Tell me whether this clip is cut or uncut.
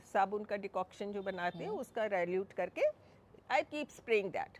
uncut